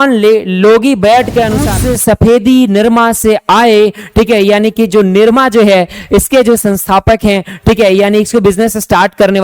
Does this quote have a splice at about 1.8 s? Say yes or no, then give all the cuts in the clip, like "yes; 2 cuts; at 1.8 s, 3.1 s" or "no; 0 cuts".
yes; 1 cut; at 1.8 s